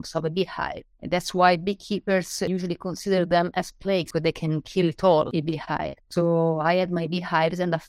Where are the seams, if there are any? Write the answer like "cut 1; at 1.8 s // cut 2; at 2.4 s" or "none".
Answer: cut 1; at 2.5 s // cut 2; at 4.1 s // cut 3; at 5.3 s